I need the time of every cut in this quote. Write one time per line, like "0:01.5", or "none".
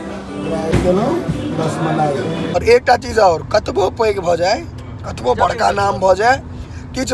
0:00.7
0:02.5